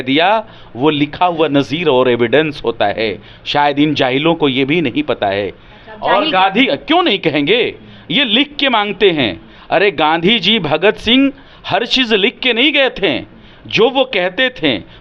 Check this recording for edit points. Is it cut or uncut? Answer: uncut